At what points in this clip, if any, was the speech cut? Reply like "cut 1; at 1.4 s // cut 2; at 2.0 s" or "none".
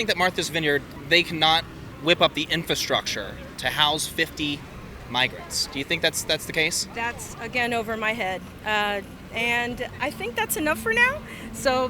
cut 1; at 0.9 s // cut 2; at 1.8 s

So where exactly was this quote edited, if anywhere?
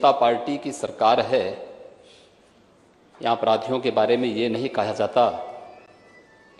none

